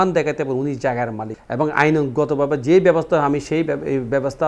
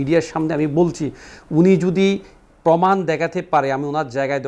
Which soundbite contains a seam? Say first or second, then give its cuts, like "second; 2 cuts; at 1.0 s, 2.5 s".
first; 1 cut; at 1.3 s